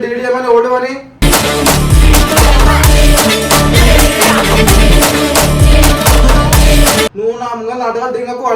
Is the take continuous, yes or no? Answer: no